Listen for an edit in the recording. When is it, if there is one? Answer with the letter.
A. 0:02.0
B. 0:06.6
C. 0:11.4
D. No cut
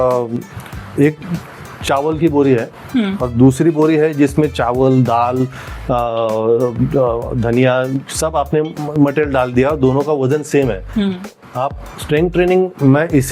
C